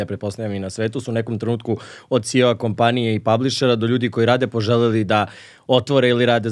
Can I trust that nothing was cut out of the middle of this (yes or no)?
yes